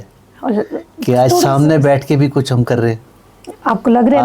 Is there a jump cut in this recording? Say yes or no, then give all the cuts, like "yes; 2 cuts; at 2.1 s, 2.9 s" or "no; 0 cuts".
no; 0 cuts